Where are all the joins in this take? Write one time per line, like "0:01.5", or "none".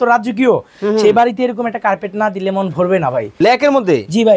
0:03.3